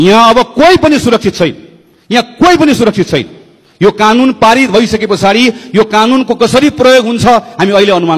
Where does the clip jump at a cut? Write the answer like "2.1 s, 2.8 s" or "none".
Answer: none